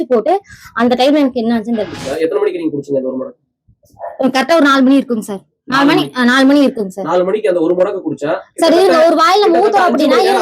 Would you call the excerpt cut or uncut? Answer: cut